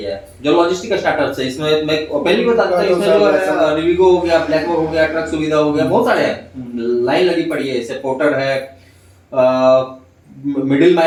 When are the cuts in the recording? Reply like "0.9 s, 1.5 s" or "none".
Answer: none